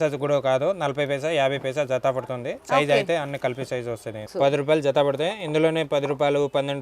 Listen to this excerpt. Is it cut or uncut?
cut